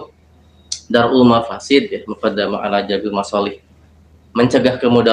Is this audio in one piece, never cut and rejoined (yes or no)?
yes